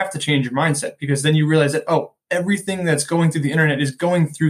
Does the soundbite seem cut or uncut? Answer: uncut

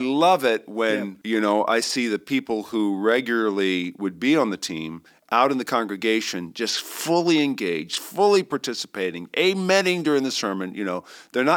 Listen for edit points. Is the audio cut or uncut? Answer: cut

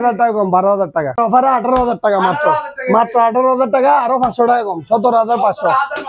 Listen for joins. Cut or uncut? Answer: cut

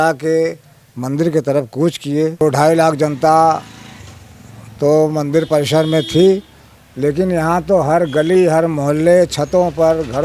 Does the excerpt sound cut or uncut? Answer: cut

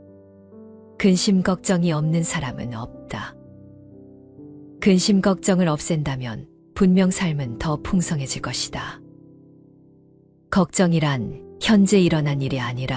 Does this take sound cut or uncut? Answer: cut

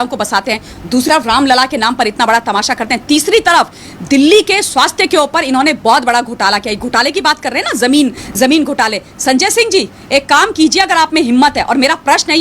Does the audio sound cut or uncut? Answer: cut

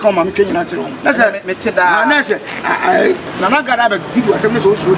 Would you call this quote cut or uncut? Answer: cut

